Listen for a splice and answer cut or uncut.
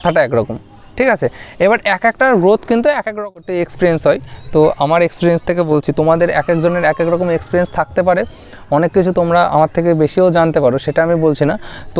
cut